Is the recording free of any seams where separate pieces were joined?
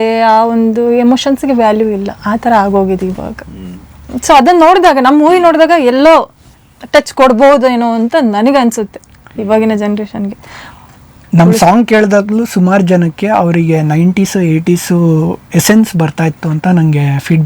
yes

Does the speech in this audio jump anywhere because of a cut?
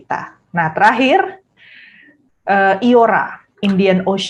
no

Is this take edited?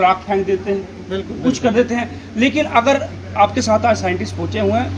no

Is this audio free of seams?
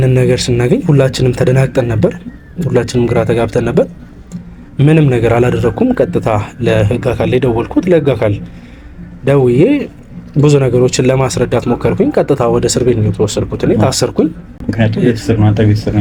yes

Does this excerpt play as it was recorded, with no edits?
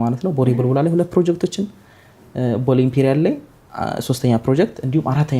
yes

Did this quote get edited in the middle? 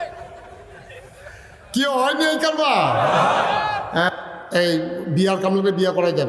yes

